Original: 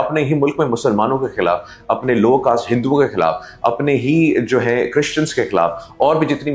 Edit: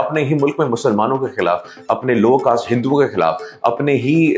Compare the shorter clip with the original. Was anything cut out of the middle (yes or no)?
no